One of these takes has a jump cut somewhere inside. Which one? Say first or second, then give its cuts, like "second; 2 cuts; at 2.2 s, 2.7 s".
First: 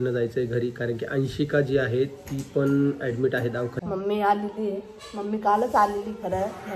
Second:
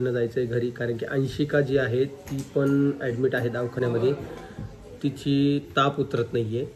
first; 1 cut; at 3.7 s